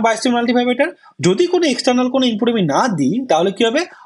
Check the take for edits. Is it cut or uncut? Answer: uncut